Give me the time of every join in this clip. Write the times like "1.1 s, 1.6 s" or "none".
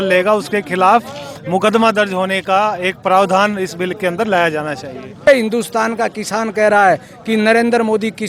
5.3 s